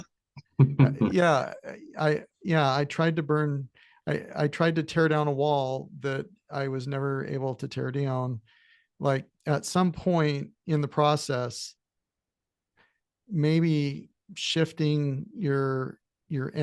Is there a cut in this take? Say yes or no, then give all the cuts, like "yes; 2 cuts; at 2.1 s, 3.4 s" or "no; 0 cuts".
no; 0 cuts